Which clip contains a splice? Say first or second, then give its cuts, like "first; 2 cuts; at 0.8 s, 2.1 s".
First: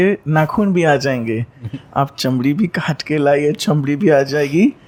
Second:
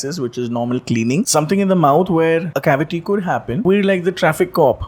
second; 3 cuts; at 1.3 s, 2.5 s, 3.6 s